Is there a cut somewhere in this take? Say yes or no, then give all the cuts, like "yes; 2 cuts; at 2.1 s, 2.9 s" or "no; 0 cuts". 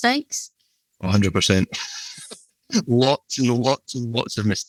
no; 0 cuts